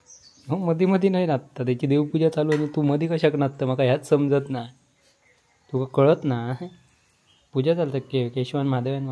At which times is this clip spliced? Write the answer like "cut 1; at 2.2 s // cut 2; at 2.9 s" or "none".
none